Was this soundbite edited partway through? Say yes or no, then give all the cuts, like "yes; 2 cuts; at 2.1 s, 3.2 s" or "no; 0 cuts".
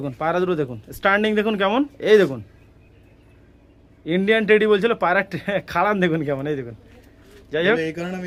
no; 0 cuts